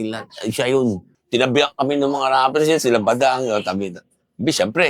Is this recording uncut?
no; 1 cut; at 1.1 s

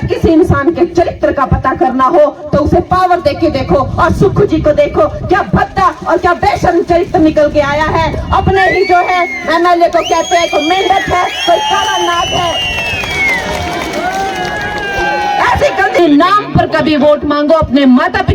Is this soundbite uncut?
no; 1 cut; at 16.0 s

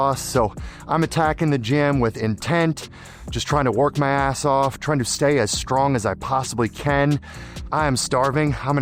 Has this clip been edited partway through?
no; 0 cuts

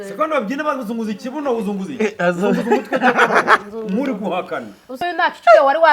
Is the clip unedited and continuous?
no; 1 cut; at 5.0 s

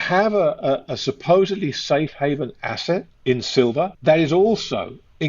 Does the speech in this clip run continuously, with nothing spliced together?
no; 2 cuts; at 3.1 s, 3.9 s

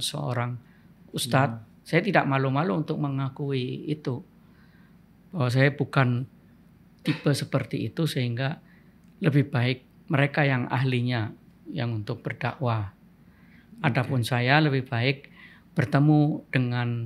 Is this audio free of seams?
yes; 0 cuts

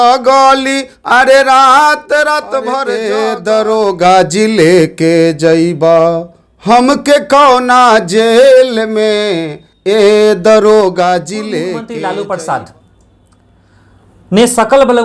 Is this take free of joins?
no; 2 cuts; at 3.0 s, 11.8 s

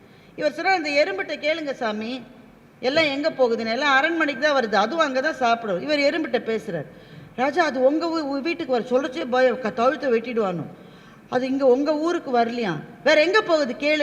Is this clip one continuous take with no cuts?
yes; 0 cuts

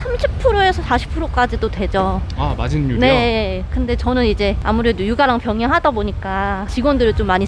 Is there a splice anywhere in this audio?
no; 0 cuts

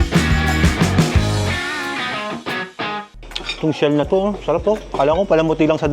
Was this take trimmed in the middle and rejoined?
yes; 1 cut; at 3.1 s

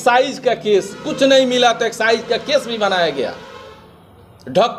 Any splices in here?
no; 0 cuts

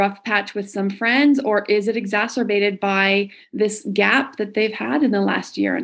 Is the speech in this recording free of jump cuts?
yes; 0 cuts

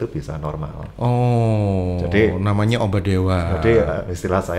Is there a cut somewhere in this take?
no; 0 cuts

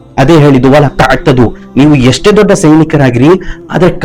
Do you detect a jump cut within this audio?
no; 0 cuts

